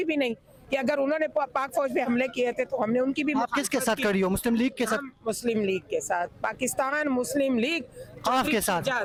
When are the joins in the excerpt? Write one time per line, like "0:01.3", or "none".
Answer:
none